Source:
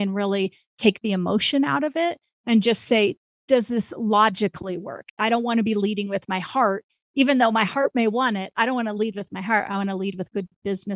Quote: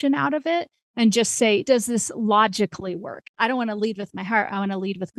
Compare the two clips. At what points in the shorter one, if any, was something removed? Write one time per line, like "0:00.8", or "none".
0:01.6
0:03.3